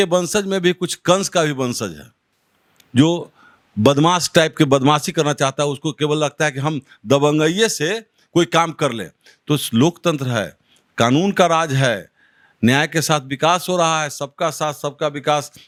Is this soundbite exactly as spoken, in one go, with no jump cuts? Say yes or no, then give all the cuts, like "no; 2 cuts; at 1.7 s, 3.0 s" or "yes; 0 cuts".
yes; 0 cuts